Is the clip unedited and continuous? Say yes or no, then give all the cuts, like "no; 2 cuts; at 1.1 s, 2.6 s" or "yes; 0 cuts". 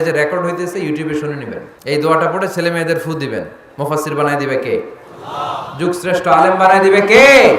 no; 1 cut; at 1.7 s